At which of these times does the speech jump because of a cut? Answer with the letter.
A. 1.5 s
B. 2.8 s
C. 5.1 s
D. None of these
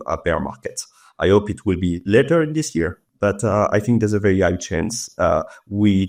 D